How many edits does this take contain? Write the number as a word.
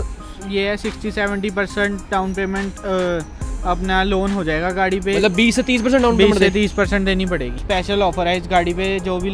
one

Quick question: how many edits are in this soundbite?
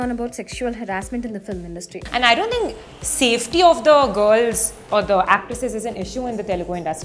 one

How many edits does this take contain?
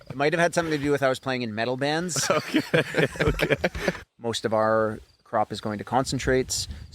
one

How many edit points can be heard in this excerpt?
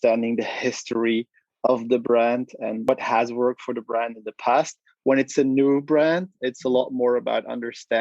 one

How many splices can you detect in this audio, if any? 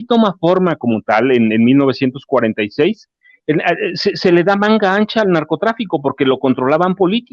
zero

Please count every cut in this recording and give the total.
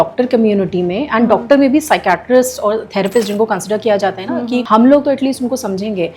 one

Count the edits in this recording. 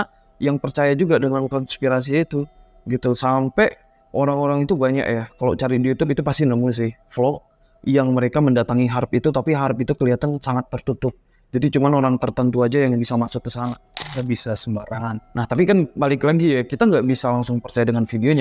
zero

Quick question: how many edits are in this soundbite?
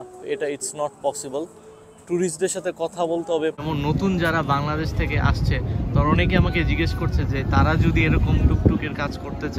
one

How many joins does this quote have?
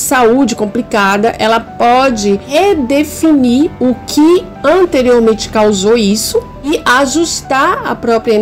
two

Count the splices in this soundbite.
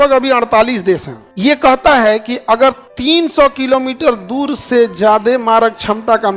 two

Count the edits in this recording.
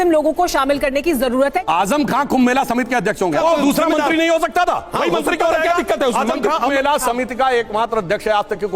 three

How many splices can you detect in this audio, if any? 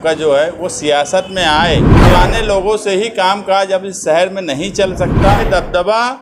two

